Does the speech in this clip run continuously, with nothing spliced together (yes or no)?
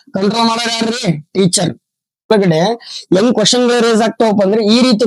no